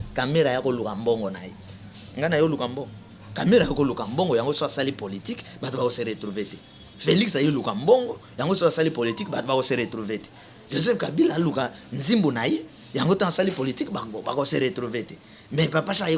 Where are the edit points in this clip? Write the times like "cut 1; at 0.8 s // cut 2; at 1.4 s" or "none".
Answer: none